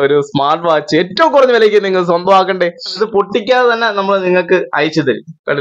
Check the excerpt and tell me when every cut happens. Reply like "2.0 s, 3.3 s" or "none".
2.9 s